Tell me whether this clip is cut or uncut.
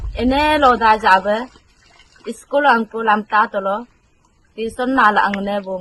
uncut